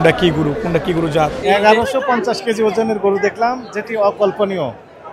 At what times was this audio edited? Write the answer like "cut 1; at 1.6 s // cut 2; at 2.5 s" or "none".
cut 1; at 1.4 s